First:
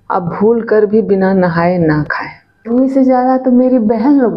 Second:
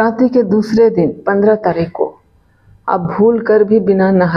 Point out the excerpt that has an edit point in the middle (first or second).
first